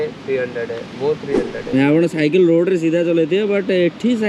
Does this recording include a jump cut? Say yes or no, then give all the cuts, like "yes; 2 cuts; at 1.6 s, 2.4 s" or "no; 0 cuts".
yes; 1 cut; at 1.7 s